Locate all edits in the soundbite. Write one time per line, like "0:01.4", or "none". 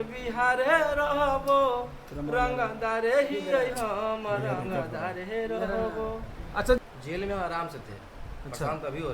0:06.8